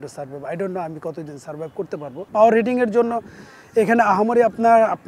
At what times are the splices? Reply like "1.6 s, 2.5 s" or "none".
2.3 s